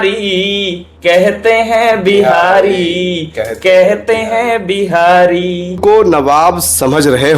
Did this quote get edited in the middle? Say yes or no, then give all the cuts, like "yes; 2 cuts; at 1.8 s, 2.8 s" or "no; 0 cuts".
yes; 1 cut; at 5.8 s